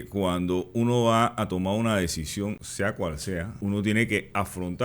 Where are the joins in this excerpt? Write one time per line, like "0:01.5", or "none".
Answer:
0:02.7
0:03.5